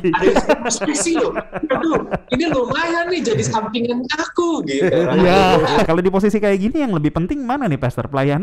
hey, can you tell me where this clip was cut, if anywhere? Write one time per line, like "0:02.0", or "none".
0:05.9

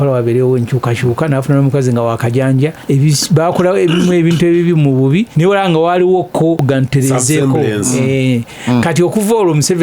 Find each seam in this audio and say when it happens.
0:02.8
0:05.3
0:06.6

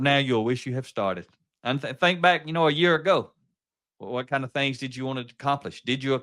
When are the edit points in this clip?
none

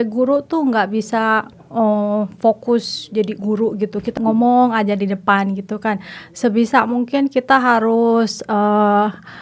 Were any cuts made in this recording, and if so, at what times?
0:01.6
0:04.1

